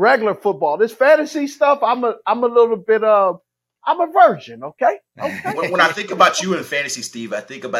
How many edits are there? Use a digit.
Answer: 0